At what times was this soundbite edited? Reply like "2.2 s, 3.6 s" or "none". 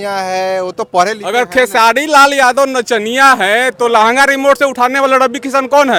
none